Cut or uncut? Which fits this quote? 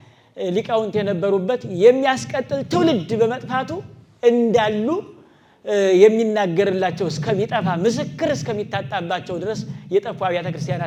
uncut